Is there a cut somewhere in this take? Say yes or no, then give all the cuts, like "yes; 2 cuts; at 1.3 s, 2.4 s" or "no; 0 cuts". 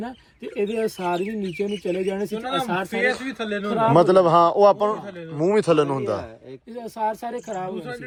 no; 0 cuts